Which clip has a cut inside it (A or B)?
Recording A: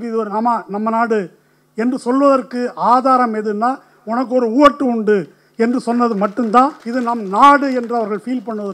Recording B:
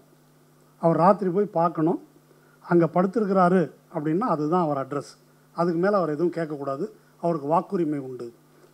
A